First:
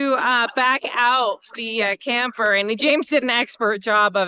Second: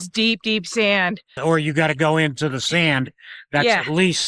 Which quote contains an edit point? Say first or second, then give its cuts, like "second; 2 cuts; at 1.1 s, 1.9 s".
second; 1 cut; at 1.3 s